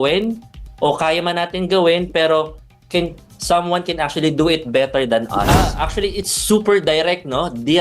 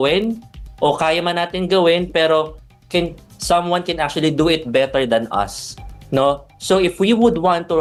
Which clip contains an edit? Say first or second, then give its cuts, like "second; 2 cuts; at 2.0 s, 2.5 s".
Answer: first; 1 cut; at 5.5 s